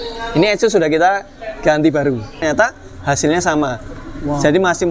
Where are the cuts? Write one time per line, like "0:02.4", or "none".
0:02.4